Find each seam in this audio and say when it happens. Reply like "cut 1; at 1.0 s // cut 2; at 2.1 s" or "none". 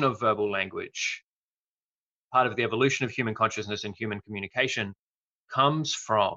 none